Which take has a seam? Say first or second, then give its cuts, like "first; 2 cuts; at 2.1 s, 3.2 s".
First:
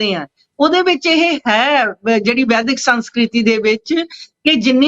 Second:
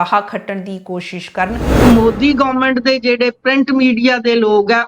second; 1 cut; at 1.7 s